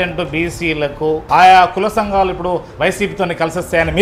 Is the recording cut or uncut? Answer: cut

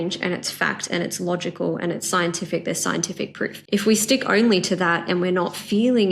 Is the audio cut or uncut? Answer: cut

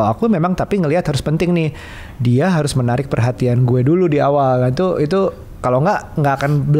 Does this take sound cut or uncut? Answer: uncut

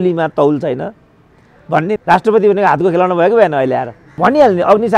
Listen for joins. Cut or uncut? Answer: cut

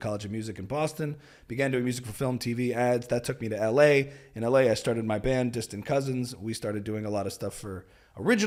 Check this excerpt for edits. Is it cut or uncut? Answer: uncut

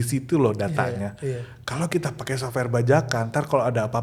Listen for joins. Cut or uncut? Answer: uncut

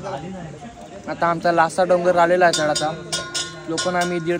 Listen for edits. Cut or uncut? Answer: uncut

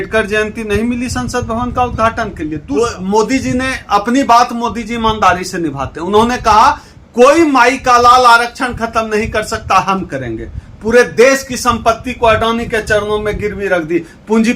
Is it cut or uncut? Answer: cut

